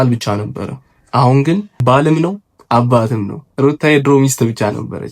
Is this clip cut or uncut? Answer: cut